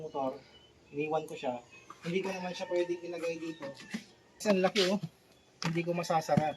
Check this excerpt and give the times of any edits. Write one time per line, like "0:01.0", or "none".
0:04.4